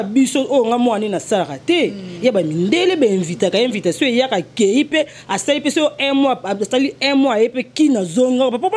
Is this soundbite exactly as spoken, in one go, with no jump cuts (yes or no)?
yes